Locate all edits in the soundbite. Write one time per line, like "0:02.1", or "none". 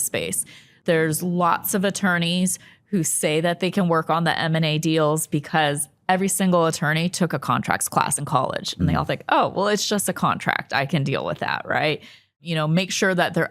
0:12.4